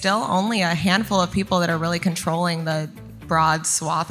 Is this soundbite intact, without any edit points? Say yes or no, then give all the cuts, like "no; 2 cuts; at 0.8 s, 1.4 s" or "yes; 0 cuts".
yes; 0 cuts